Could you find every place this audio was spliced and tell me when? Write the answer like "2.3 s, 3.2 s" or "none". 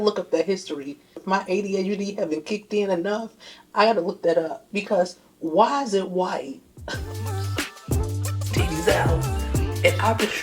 7.1 s